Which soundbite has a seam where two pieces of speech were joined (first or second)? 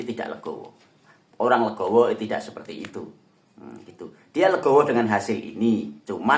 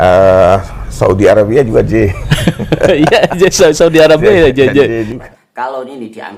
second